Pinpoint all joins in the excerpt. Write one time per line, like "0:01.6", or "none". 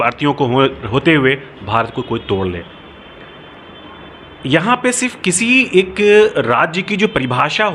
none